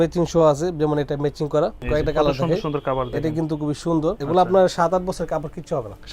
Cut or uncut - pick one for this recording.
cut